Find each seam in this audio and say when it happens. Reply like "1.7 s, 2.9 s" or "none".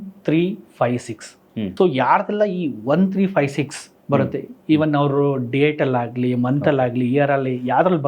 1.7 s